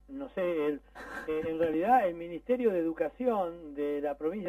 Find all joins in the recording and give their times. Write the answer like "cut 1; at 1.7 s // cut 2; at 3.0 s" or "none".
cut 1; at 2.3 s